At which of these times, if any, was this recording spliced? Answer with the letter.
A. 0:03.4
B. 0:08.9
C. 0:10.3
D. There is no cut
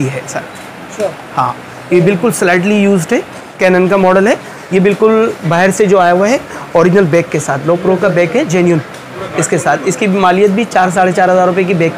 A